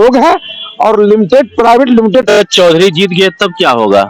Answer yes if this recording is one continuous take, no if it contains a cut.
no